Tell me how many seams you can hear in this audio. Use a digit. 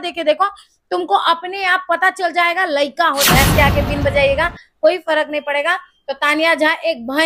1